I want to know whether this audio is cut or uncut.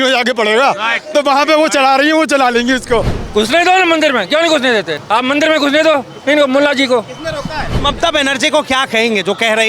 cut